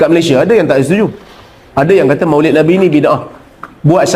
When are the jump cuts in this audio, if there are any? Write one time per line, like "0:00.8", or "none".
none